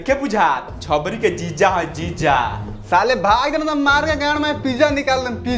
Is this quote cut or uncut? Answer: uncut